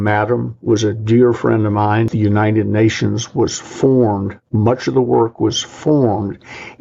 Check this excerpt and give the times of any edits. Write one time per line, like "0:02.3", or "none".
0:02.1